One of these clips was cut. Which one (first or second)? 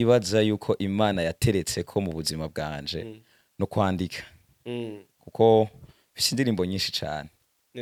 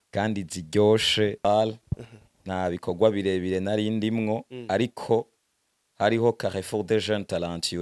second